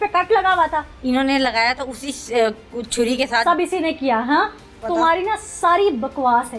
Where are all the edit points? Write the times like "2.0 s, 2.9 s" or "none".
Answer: 4.8 s